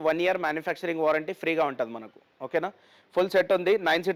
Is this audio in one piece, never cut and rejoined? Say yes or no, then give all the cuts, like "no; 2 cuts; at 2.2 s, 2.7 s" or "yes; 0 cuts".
yes; 0 cuts